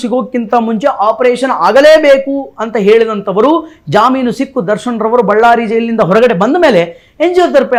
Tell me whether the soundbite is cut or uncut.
uncut